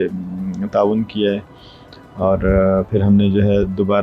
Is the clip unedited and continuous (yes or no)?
yes